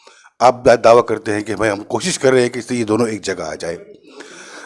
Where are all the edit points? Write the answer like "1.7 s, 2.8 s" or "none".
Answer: none